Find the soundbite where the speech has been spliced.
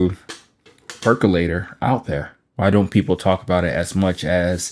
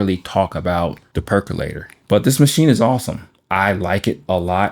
second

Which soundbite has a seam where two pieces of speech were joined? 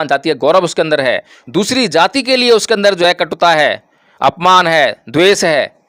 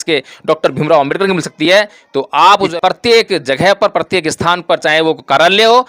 second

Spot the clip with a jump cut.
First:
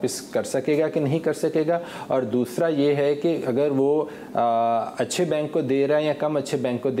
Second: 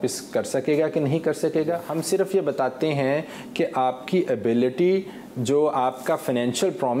second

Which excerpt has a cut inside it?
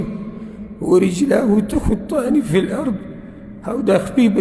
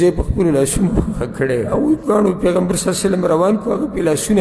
second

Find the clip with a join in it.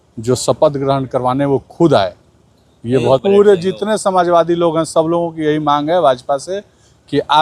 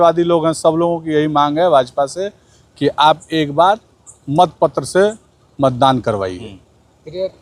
first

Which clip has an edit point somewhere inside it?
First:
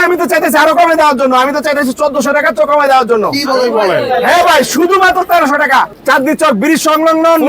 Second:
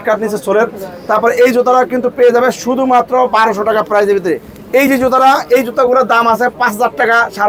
first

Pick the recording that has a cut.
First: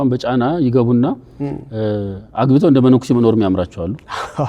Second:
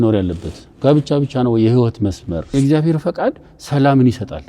second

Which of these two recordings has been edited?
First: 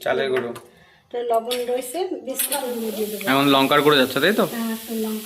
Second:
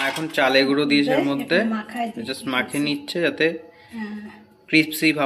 first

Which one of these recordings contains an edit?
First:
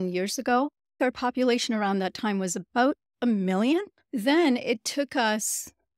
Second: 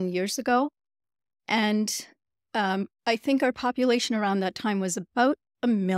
first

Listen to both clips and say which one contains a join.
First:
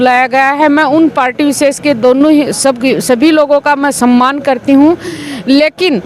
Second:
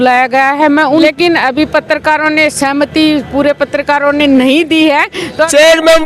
second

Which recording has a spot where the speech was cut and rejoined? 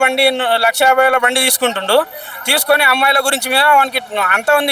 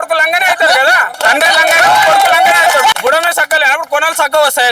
second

